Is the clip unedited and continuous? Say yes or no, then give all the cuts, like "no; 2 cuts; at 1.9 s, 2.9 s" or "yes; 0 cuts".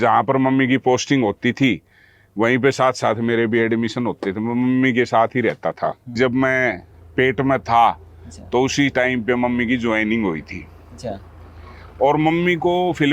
no; 1 cut; at 6.1 s